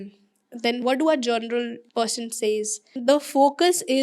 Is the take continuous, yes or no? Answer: no